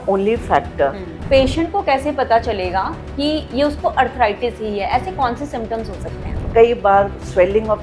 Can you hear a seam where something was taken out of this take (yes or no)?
yes